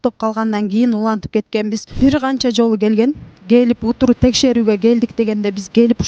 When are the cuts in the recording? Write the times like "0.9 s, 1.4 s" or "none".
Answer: 1.9 s